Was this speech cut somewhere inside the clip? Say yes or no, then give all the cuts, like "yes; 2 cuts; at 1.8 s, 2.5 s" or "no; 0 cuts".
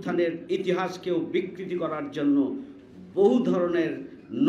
no; 0 cuts